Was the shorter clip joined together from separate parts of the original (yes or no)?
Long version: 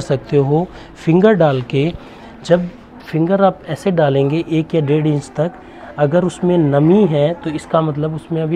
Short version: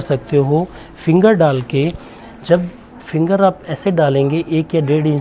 no